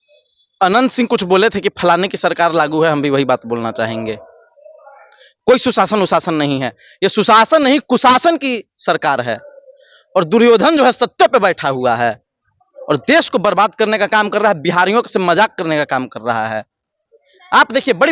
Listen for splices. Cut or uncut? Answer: uncut